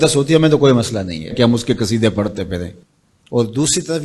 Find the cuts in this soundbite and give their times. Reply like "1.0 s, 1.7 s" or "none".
2.8 s